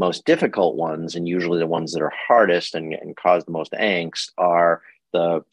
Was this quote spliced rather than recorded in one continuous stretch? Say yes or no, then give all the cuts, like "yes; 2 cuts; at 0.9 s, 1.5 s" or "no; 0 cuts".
no; 0 cuts